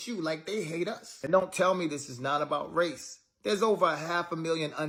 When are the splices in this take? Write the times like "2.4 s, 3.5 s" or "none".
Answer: none